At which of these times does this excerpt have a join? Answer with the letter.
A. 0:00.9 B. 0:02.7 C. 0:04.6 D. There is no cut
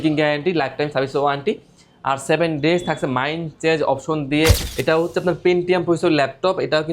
C